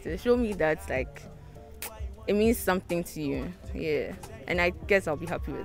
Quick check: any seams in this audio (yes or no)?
no